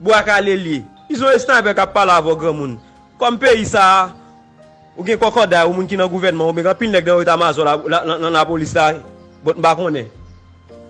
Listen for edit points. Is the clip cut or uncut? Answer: cut